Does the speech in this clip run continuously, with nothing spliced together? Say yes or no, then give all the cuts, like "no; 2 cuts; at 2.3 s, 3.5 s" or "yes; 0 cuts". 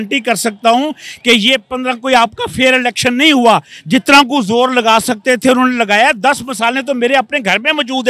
yes; 0 cuts